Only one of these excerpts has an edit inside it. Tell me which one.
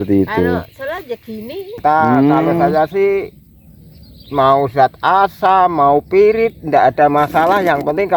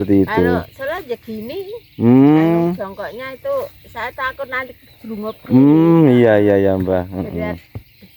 first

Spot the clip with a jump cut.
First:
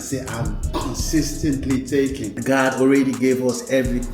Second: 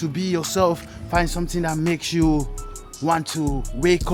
first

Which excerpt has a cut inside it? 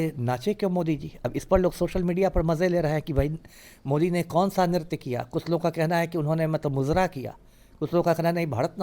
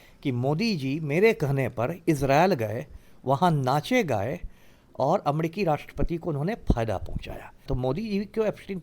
second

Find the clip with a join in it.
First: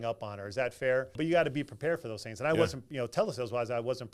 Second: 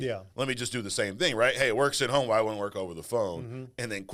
first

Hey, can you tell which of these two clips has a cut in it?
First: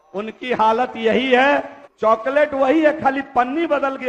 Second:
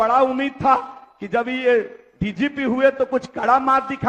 first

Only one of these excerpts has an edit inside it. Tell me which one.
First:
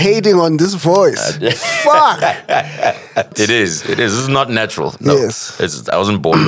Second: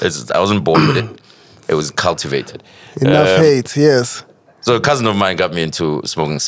first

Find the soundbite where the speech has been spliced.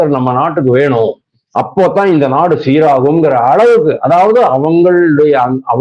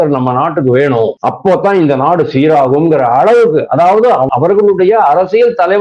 second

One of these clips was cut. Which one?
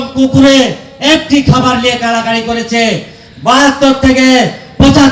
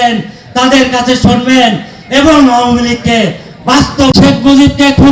second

